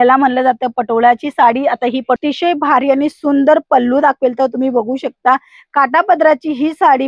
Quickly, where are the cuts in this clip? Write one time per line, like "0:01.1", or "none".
0:02.2